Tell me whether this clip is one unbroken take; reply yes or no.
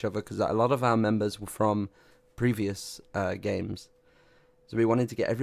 yes